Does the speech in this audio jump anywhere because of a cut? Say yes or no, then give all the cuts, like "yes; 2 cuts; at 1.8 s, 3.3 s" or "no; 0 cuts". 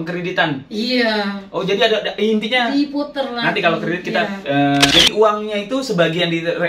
yes; 1 cut; at 4.9 s